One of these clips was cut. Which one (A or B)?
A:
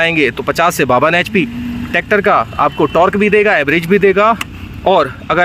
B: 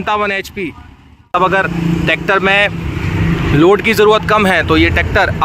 B